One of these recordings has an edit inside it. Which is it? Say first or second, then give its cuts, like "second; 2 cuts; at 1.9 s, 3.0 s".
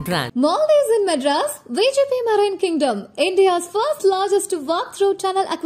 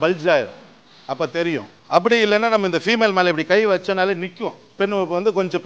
second; 2 cuts; at 1.7 s, 4.8 s